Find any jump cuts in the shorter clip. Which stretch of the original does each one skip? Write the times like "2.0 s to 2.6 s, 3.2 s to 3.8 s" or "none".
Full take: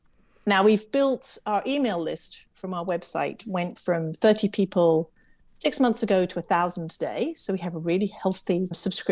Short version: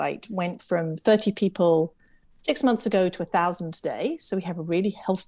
none